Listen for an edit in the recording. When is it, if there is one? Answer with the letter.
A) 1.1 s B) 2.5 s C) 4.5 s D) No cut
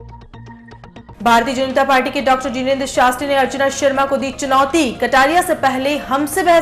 A